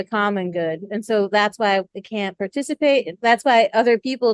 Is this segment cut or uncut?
uncut